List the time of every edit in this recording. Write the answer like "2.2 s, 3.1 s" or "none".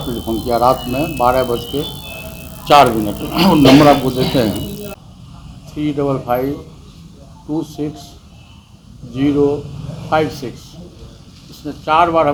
none